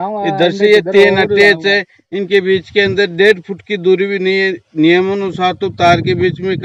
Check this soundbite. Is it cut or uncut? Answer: uncut